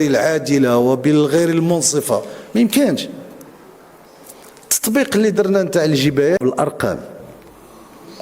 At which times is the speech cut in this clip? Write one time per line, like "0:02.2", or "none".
0:06.4